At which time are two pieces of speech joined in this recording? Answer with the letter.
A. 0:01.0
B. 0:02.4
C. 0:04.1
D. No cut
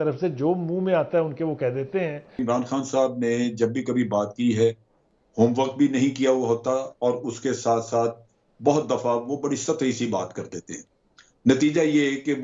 B